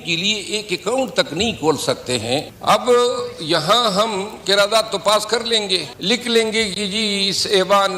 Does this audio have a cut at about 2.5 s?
yes; 2 cuts; at 2.5 s, 5.9 s

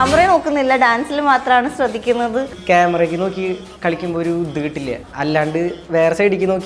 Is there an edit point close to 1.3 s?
no; 2 cuts; at 2.5 s, 5.0 s

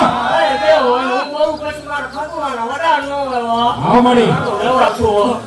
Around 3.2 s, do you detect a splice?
no; 1 cut; at 4.5 s

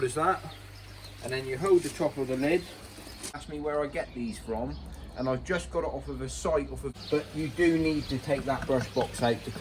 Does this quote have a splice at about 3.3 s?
yes; 2 cuts; at 3.3 s, 6.9 s

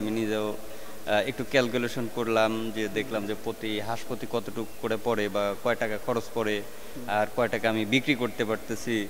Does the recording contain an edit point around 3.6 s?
no; 0 cuts

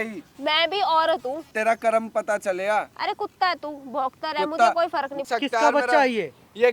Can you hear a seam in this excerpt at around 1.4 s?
yes; 2 cuts; at 1.4 s, 5.2 s

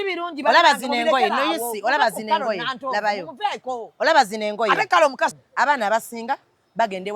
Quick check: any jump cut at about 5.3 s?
yes; 1 cut; at 5.3 s

